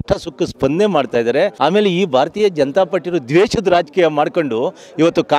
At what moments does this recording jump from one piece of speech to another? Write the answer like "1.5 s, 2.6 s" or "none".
1.5 s